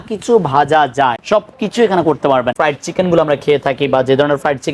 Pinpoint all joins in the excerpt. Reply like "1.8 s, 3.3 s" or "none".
1.2 s, 2.5 s